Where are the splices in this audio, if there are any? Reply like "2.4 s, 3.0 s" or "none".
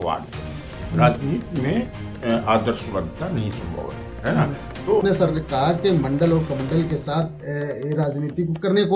5.0 s